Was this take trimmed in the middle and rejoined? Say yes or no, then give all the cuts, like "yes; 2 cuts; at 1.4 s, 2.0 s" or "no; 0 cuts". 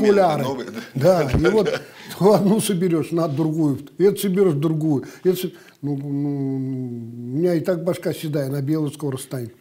no; 0 cuts